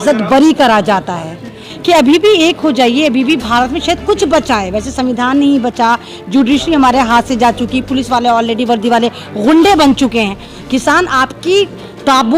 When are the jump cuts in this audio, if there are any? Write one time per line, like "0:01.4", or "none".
0:01.6
0:10.5